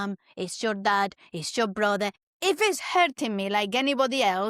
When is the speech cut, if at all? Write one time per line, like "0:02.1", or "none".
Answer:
0:02.3